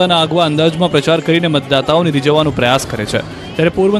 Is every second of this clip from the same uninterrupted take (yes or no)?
yes